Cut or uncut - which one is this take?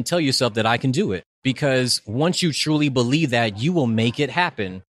cut